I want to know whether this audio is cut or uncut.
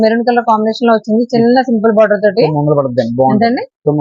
uncut